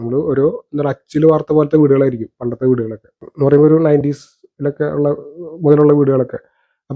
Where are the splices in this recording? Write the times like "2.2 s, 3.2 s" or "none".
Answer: 3.3 s